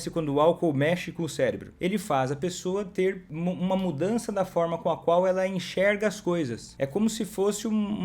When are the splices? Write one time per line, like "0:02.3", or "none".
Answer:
0:01.7
0:03.3
0:06.6

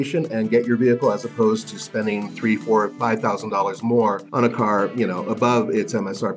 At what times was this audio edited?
0:04.2

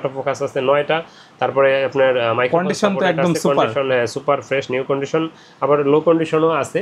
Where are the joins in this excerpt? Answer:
none

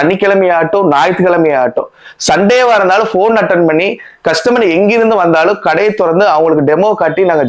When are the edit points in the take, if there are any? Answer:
none

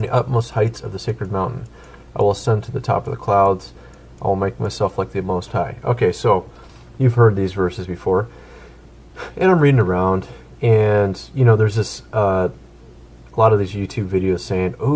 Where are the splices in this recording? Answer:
none

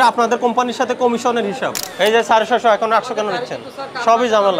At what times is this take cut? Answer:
0:01.9

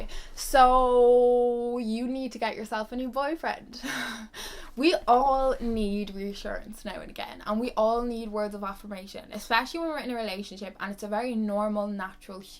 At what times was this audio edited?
none

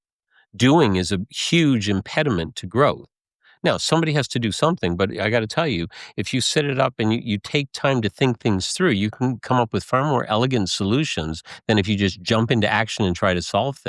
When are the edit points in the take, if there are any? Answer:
none

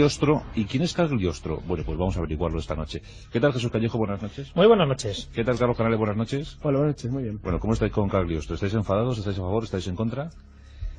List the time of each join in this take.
0:07.8

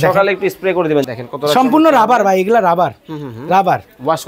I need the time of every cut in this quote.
0:01.0

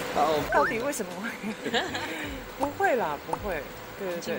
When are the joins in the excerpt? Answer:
none

